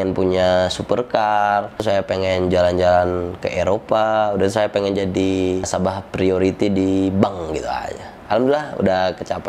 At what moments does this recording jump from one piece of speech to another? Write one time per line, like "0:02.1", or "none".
none